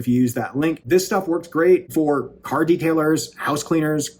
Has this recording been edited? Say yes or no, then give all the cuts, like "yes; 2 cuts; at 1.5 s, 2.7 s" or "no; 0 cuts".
yes; 2 cuts; at 0.8 s, 1.9 s